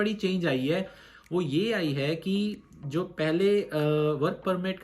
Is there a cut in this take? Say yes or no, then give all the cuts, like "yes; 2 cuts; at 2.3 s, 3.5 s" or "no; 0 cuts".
no; 0 cuts